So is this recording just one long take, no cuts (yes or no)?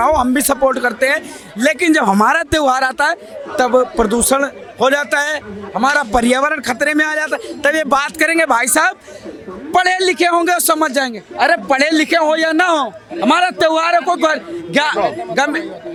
yes